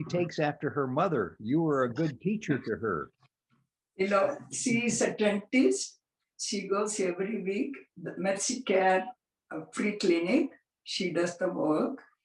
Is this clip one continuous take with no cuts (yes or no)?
yes